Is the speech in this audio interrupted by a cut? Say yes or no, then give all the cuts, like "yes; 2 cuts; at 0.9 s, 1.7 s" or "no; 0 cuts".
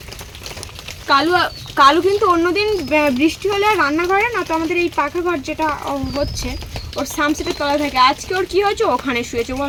no; 0 cuts